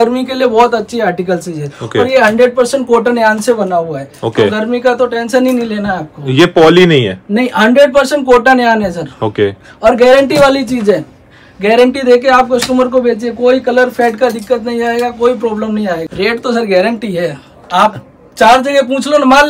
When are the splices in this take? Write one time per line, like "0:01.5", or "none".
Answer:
0:16.1